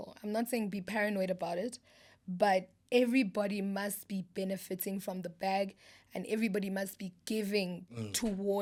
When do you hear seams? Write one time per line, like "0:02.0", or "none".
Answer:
none